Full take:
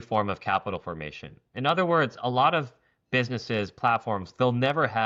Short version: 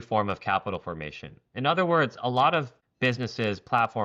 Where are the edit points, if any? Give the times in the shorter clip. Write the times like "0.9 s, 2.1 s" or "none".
2.8 s